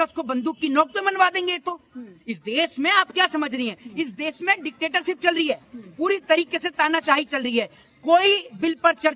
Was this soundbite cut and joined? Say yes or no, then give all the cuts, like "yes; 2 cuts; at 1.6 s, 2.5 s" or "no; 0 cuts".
no; 0 cuts